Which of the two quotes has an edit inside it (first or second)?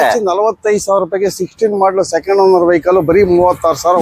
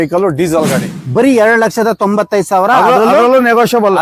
second